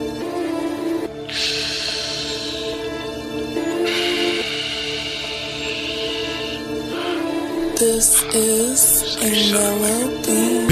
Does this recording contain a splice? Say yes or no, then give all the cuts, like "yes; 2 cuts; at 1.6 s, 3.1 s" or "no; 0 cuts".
no; 0 cuts